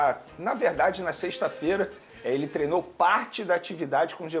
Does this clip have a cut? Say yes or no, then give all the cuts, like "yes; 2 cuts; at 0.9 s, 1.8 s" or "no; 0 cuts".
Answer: no; 0 cuts